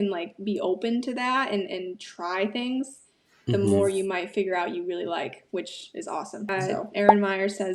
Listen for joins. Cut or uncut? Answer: cut